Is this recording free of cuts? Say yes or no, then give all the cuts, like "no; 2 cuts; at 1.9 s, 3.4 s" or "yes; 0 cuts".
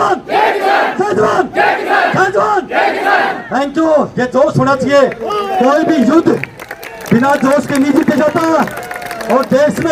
yes; 0 cuts